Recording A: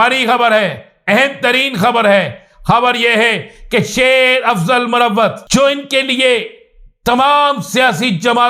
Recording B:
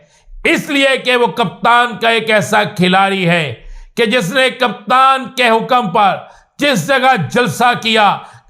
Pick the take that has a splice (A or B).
A